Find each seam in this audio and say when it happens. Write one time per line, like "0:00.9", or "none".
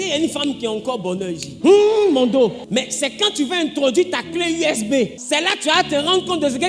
0:01.5
0:02.6
0:05.2